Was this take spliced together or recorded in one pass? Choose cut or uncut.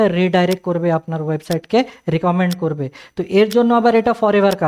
uncut